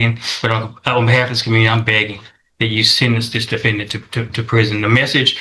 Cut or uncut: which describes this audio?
uncut